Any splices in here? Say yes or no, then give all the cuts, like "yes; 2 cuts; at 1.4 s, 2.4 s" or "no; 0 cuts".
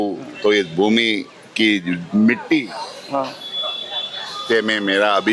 no; 0 cuts